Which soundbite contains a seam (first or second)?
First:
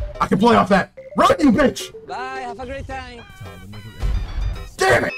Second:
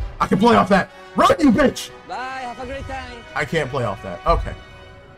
first